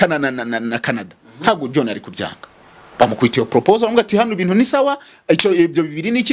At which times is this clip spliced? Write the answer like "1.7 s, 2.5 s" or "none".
none